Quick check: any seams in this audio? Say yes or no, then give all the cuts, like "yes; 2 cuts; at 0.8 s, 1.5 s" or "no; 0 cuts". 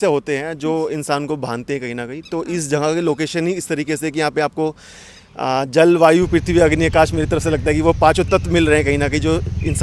no; 0 cuts